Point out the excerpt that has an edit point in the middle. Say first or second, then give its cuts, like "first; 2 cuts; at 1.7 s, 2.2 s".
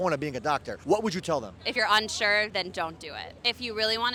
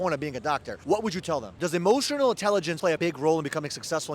second; 1 cut; at 1.6 s